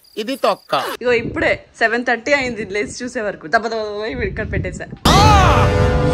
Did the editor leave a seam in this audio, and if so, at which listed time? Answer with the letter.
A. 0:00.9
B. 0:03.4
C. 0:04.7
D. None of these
A